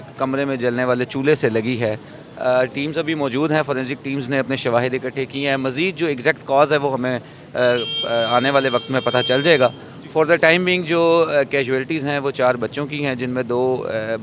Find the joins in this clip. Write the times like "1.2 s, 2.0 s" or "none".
none